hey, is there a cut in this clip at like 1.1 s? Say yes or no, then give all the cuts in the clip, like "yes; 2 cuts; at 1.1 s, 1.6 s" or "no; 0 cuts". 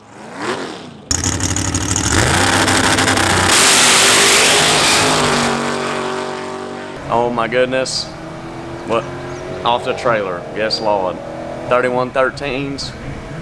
yes; 2 cuts; at 1.1 s, 7.0 s